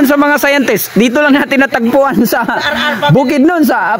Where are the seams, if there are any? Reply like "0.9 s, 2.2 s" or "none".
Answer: none

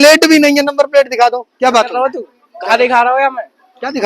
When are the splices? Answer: 1.5 s

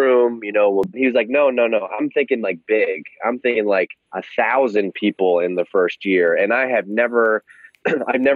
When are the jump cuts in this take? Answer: 1.0 s

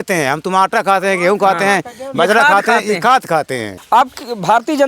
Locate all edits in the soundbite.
3.7 s

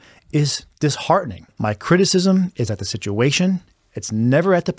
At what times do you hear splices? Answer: 1.5 s

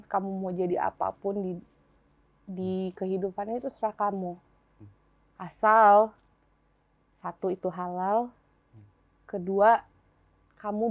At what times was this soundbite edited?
none

